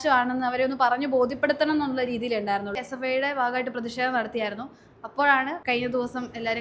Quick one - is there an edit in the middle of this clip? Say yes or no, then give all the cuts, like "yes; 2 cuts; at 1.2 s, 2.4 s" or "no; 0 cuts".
yes; 2 cuts; at 2.9 s, 5.6 s